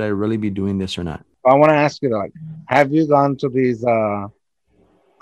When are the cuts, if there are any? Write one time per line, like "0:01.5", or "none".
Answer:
0:01.2